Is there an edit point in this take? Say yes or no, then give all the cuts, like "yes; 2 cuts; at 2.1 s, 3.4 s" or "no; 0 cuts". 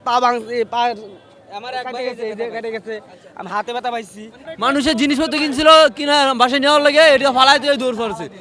no; 0 cuts